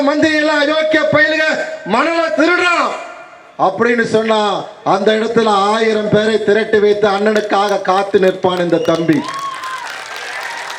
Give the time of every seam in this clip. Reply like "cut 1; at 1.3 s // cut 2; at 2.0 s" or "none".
none